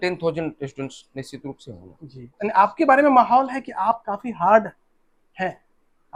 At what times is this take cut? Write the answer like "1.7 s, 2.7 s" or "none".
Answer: none